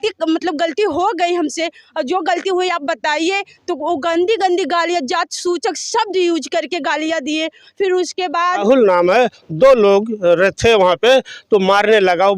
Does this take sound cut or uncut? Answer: cut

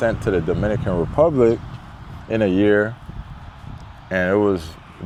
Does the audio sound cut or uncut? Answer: uncut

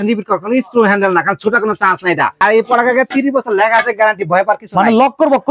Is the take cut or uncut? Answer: cut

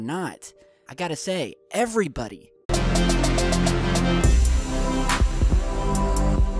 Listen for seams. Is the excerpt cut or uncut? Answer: uncut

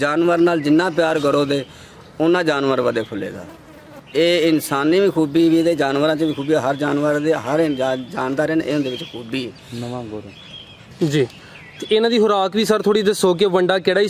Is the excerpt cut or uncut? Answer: uncut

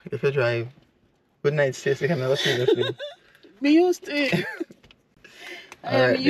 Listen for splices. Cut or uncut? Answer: uncut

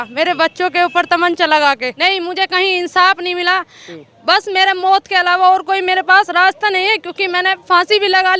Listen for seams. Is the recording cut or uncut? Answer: cut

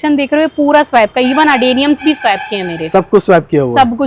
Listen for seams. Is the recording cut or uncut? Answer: uncut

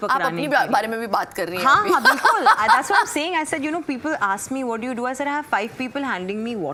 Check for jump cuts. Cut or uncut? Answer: uncut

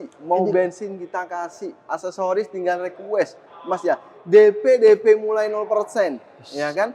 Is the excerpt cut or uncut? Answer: uncut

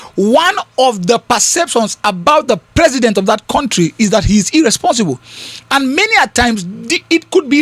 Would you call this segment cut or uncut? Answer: uncut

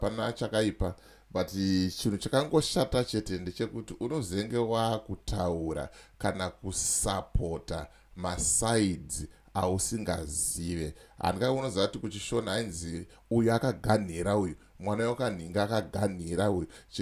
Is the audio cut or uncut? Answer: uncut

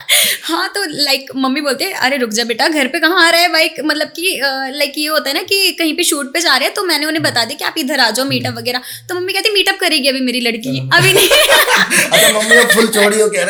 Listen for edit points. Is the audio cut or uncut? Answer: uncut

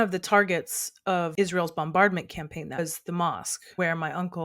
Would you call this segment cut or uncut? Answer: cut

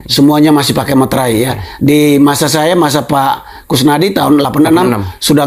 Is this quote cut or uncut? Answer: uncut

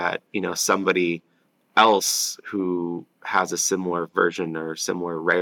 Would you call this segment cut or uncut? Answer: uncut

